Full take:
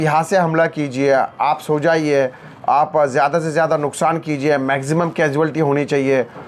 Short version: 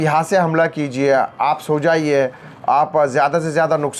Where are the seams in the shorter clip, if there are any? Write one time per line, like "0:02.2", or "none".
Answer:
none